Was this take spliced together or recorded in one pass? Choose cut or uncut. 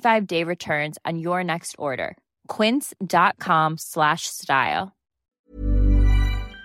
cut